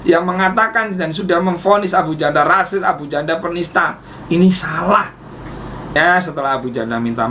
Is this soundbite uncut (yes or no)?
no